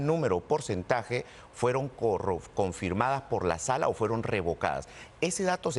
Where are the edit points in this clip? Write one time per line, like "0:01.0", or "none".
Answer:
none